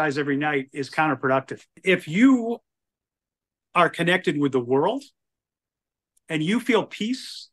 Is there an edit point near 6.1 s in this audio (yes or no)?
no